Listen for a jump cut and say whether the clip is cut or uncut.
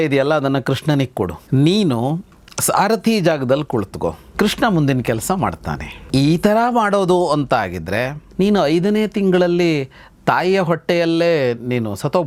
uncut